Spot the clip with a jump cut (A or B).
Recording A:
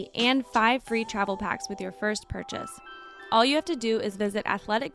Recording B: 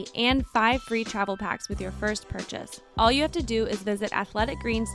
B